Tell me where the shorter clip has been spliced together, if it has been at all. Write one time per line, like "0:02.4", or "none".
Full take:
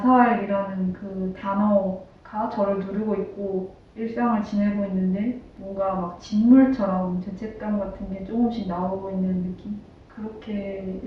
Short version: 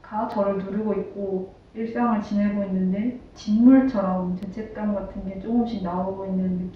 0:03.3